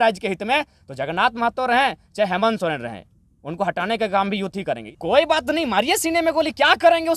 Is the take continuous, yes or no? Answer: no